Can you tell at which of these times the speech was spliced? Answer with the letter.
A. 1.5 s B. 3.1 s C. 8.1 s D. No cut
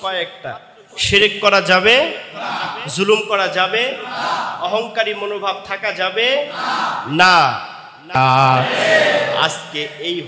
C